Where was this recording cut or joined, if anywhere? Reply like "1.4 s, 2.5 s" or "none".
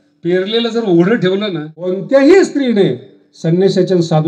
2.0 s